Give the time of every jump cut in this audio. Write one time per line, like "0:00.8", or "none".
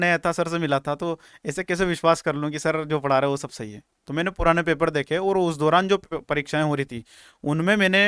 none